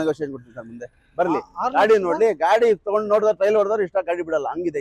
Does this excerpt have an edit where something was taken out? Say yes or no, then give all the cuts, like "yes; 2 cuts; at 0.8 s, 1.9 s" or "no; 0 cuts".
no; 0 cuts